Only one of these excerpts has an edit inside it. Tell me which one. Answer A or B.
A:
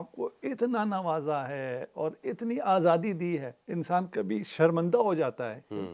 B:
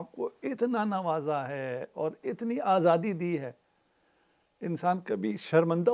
A